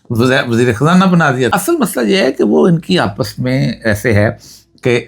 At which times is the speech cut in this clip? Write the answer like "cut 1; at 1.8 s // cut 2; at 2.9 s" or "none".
cut 1; at 1.5 s